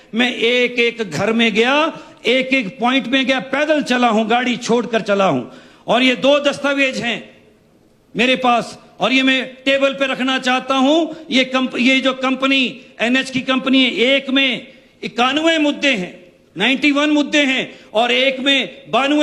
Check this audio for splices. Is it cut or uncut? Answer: uncut